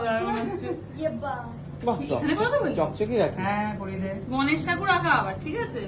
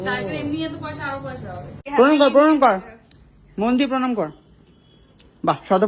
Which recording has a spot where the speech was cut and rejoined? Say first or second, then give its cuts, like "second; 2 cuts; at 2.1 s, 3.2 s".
second; 1 cut; at 1.8 s